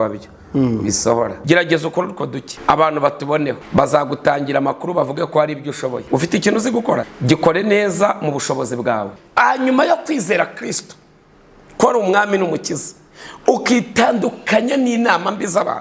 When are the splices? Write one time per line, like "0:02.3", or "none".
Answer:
0:01.4
0:02.5
0:03.6
0:06.0
0:07.1
0:09.2